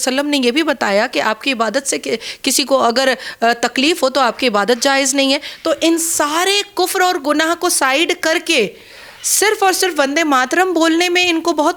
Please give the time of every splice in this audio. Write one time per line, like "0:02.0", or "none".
none